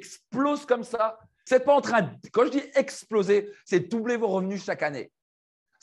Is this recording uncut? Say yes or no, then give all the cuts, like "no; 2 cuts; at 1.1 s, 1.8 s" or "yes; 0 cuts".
no; 1 cut; at 1.4 s